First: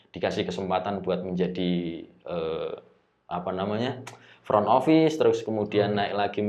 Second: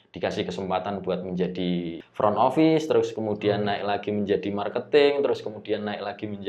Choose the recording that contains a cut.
second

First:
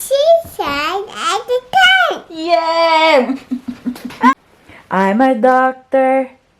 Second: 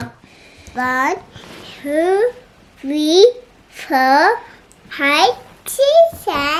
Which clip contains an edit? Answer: first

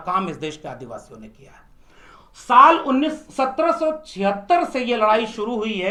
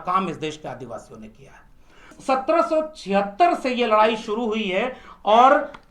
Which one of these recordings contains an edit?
second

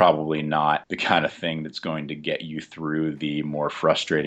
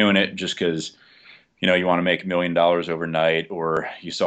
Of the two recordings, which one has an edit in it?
first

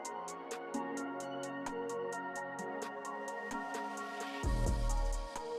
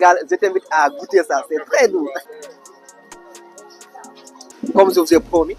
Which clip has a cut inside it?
second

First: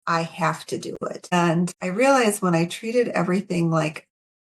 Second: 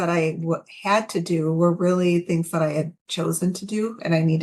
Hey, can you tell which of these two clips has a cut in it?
first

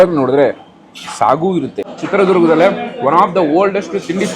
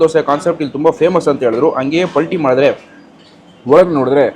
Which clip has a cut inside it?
first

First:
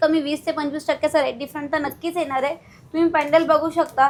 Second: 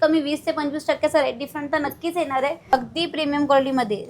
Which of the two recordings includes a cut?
second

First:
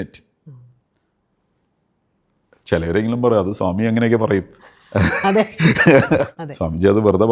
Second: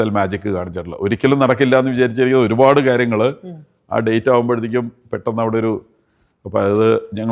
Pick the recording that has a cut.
first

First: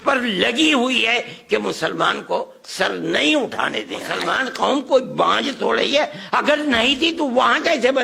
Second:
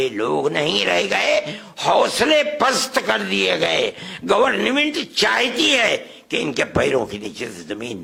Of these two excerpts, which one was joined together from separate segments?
first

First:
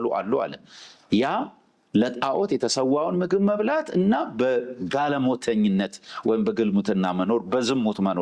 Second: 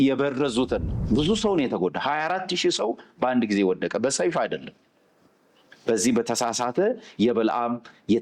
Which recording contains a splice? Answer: second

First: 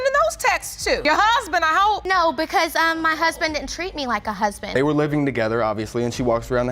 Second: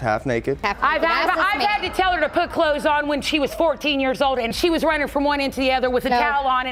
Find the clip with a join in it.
first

